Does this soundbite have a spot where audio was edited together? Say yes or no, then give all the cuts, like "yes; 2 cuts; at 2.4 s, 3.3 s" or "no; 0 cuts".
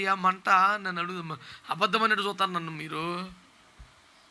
no; 0 cuts